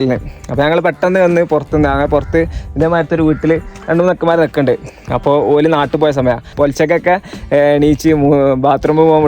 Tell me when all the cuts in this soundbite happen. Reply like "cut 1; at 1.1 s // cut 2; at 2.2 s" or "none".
cut 1; at 6.5 s